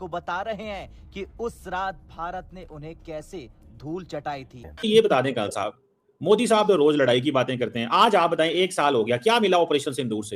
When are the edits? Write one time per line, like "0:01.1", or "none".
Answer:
0:04.8